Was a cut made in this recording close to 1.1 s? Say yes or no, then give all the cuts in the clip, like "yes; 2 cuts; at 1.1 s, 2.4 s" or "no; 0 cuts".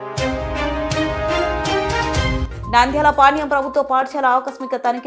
no; 1 cut; at 2.4 s